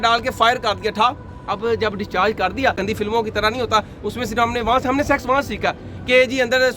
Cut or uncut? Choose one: cut